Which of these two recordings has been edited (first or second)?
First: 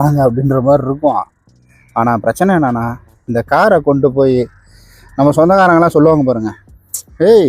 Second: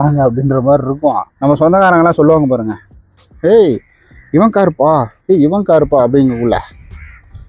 second